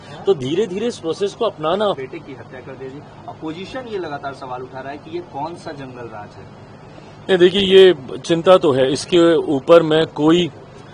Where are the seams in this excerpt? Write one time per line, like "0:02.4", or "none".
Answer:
0:02.0